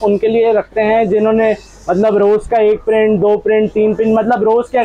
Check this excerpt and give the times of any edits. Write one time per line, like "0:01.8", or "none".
none